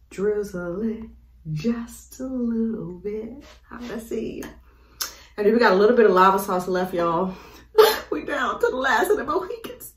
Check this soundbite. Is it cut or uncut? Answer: uncut